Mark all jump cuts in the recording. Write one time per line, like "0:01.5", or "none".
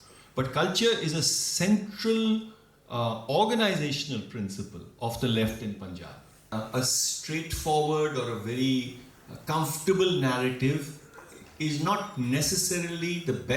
0:06.5